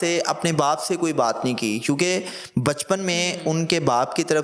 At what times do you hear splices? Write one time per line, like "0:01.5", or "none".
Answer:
none